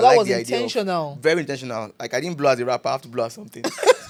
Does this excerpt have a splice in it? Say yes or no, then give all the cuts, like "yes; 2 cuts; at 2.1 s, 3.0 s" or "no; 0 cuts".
no; 0 cuts